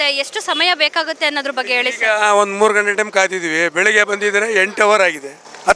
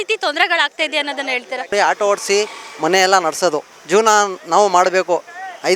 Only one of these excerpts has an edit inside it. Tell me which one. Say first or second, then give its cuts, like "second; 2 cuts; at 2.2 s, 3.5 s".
second; 2 cuts; at 1.7 s, 3.7 s